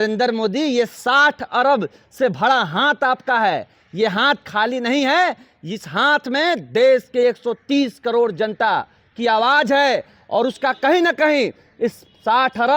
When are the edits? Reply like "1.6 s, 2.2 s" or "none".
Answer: none